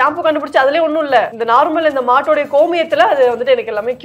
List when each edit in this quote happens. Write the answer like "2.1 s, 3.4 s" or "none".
1.4 s